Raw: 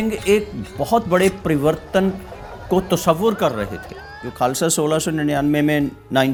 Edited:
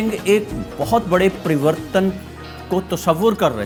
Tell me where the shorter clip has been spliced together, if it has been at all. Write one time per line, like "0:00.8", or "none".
none